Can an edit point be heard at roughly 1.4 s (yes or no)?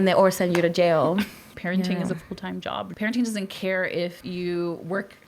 yes